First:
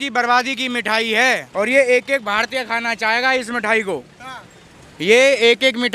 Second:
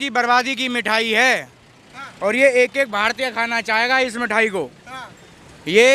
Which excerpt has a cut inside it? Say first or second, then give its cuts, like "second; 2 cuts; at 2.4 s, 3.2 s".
first; 1 cut; at 1.5 s